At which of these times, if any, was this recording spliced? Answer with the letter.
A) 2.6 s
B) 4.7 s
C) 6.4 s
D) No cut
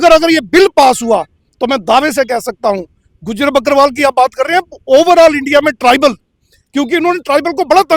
D